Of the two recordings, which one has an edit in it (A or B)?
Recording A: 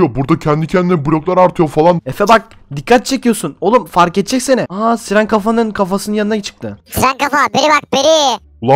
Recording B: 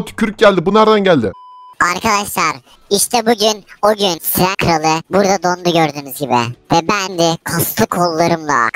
B